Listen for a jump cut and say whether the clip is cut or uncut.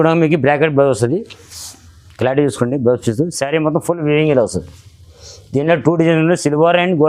uncut